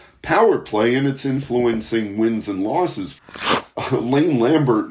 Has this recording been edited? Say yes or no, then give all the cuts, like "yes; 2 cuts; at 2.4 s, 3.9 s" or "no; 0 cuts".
yes; 1 cut; at 3.2 s